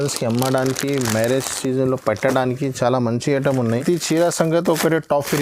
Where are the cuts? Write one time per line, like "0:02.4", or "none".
0:03.8